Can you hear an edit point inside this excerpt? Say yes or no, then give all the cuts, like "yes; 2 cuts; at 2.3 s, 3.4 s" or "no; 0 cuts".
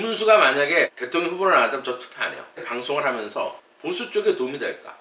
yes; 3 cuts; at 1.0 s, 2.6 s, 3.6 s